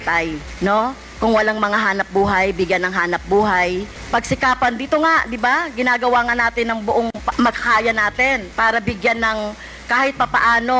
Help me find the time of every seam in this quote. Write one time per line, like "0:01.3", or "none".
none